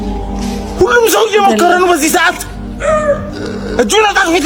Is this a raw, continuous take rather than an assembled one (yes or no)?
yes